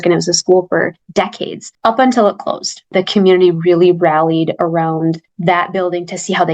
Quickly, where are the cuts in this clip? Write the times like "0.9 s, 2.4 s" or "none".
2.8 s